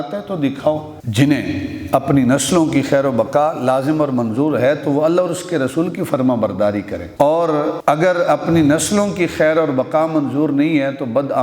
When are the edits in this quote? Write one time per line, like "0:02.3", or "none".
0:01.0
0:07.0